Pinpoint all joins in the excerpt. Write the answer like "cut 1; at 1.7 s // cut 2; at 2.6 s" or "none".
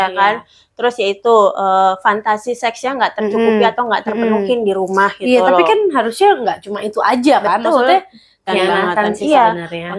cut 1; at 8.5 s